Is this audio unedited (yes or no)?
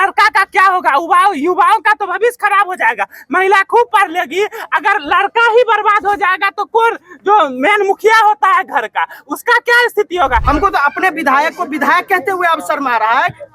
no